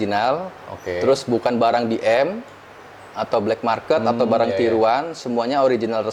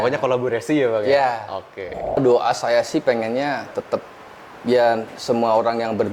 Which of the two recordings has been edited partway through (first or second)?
second